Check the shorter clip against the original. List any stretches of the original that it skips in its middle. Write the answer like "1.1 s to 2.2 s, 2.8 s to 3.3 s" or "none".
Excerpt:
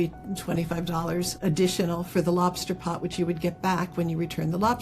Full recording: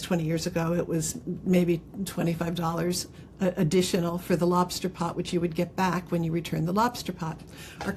3.1 s to 3.5 s